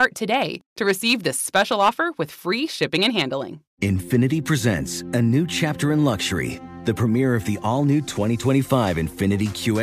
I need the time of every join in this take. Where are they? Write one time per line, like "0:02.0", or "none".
0:03.6